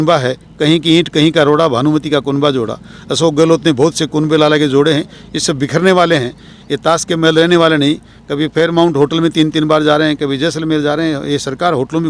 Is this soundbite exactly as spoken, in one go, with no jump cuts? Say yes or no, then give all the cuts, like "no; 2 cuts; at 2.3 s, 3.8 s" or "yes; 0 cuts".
yes; 0 cuts